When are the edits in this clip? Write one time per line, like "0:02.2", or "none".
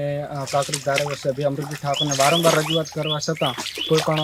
none